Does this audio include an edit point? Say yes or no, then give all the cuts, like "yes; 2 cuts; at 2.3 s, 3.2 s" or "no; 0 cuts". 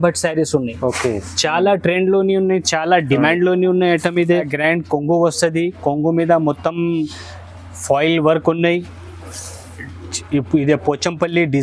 yes; 1 cut; at 4.5 s